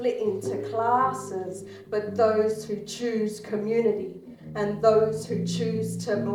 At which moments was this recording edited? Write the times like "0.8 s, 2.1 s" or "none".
none